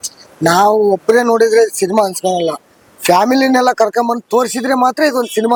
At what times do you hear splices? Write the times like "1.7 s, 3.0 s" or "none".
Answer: none